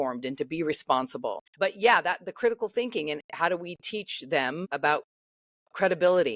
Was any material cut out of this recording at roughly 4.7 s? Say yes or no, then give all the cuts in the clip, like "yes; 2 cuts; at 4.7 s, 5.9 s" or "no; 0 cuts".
yes; 2 cuts; at 1.4 s, 4.7 s